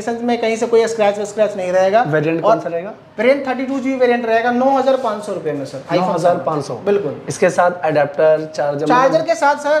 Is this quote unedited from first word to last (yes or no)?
yes